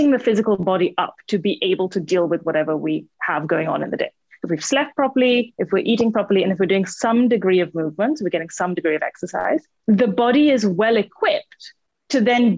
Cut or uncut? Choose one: cut